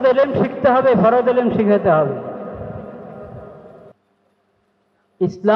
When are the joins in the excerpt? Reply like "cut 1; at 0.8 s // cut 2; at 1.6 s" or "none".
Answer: cut 1; at 4.0 s